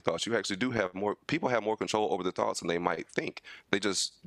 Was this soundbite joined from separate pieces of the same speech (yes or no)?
no